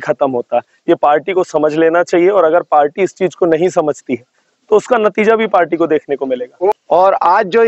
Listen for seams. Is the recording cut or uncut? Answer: cut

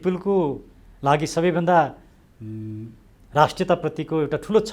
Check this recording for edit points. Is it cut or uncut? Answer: uncut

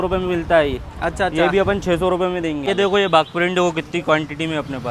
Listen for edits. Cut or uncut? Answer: cut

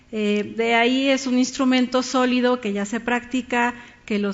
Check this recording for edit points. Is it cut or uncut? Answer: uncut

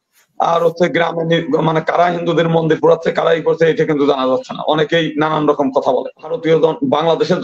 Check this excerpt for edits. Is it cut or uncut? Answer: cut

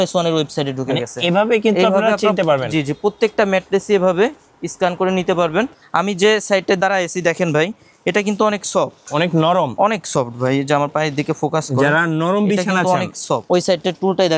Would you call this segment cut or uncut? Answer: cut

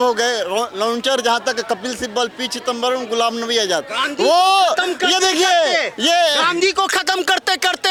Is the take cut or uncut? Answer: uncut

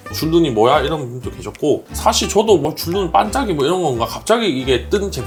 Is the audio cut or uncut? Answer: uncut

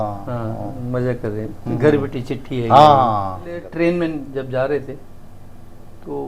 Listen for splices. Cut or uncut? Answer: cut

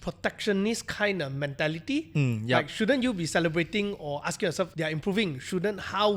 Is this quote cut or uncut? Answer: uncut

